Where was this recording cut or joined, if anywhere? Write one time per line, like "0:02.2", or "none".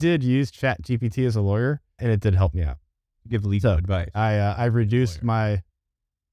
0:02.0